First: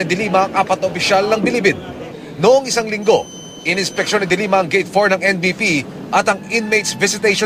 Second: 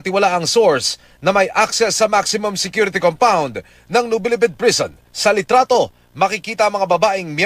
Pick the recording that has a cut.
second; 1 cut; at 1.5 s

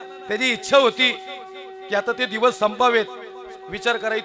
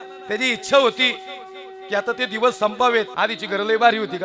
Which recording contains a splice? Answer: second; 1 cut; at 3.1 s

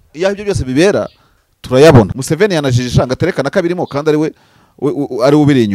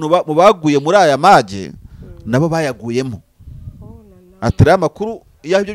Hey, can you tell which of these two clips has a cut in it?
first; 1 cut; at 2.1 s

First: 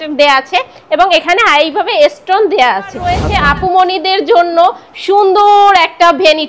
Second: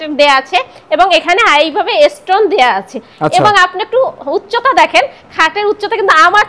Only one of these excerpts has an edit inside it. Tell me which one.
first; 1 cut; at 3.2 s

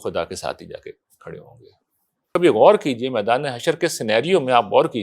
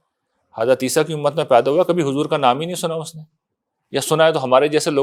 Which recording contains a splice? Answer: first; 1 cut; at 2.3 s

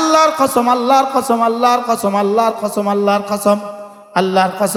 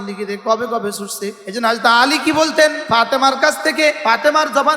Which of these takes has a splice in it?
second; 3 cuts; at 1.4 s, 2.8 s, 4.0 s

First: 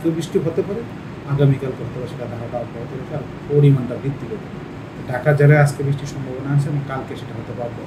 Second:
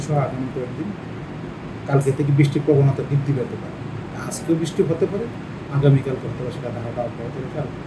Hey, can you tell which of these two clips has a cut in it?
first; 1 cut; at 4.4 s

